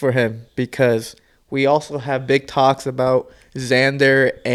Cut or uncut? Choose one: uncut